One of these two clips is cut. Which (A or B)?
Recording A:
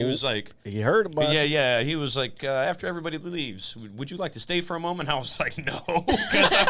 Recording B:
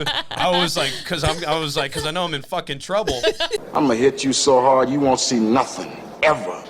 B